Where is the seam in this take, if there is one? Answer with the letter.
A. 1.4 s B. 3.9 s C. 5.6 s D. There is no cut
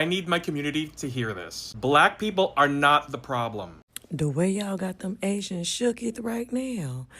B